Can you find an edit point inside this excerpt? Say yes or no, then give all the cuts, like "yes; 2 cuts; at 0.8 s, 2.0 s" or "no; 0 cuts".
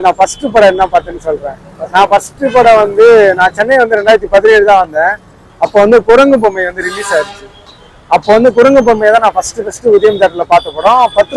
no; 0 cuts